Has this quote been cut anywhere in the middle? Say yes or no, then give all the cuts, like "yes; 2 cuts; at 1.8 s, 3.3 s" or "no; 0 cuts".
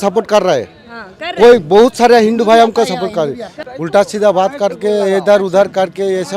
yes; 1 cut; at 3.5 s